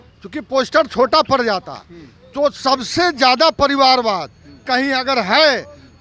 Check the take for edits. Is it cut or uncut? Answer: uncut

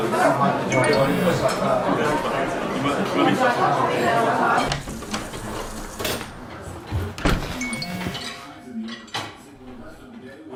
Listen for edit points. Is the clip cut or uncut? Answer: uncut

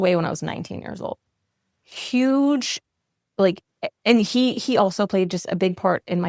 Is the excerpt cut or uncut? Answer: uncut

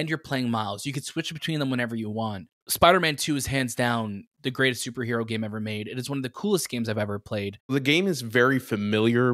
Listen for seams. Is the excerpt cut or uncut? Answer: cut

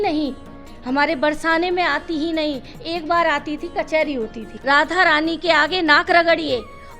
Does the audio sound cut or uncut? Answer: cut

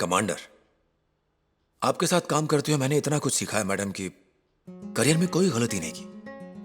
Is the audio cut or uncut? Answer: uncut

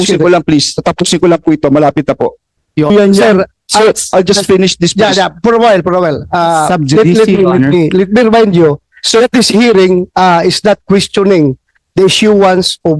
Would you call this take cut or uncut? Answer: cut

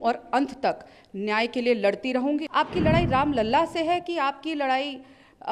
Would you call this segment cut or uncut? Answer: cut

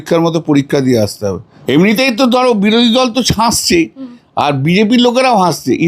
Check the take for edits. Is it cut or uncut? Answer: cut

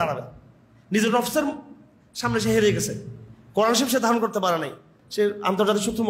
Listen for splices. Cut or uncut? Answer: cut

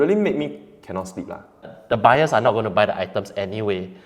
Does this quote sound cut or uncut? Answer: cut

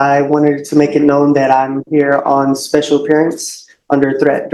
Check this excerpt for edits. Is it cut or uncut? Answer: uncut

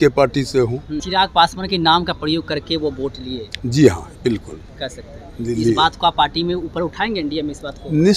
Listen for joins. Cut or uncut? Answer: cut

